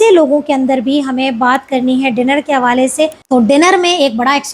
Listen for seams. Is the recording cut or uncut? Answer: cut